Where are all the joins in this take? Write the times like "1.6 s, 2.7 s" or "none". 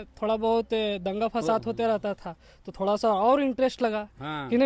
none